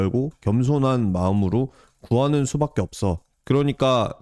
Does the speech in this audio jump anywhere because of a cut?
yes; 1 cut; at 3.3 s

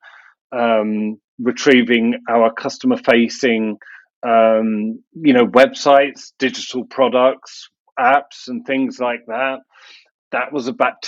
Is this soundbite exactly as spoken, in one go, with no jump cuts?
yes; 0 cuts

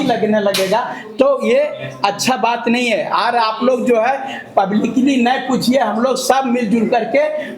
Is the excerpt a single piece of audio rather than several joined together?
yes; 0 cuts

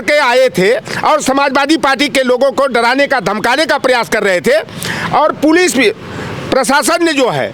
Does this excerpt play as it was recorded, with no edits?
yes; 0 cuts

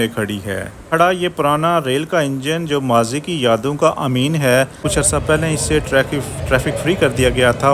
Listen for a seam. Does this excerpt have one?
yes; 2 cuts; at 0.8 s, 4.8 s

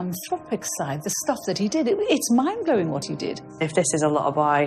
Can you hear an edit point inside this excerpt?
yes; 1 cut; at 3.7 s

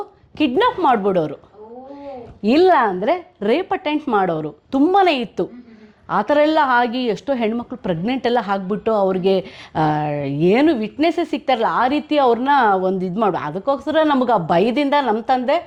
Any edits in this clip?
no; 0 cuts

